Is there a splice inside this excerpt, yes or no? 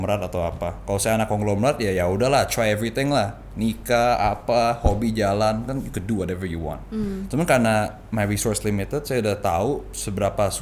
no